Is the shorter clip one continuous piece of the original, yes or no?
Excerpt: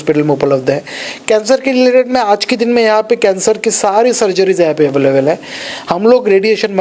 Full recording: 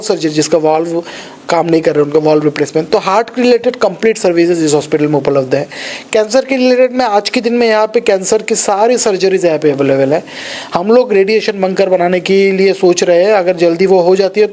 yes